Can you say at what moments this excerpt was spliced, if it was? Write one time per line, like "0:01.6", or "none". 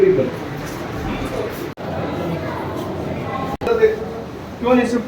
none